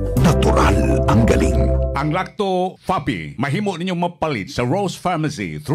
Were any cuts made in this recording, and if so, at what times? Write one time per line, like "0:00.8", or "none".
0:01.9